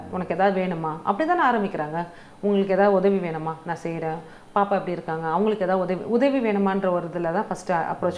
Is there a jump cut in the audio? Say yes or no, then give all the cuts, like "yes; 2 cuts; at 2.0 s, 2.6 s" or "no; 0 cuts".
no; 0 cuts